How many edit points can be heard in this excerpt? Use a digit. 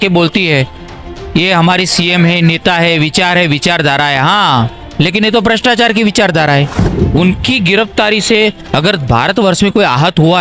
0